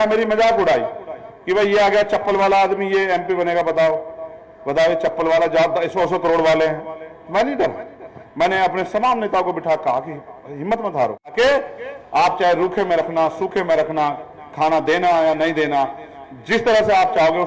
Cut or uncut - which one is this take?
cut